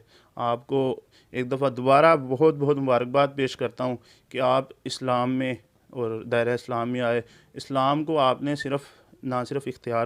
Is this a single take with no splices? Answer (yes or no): yes